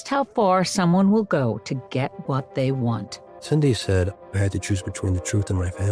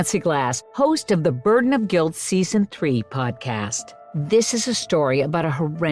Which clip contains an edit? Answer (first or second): second